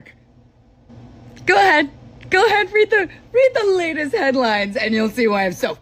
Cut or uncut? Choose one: uncut